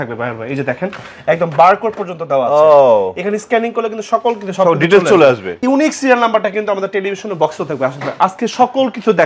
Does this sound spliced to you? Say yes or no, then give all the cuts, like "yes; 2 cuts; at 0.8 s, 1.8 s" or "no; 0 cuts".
yes; 1 cut; at 5.6 s